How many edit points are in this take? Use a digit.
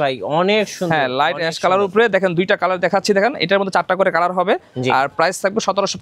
0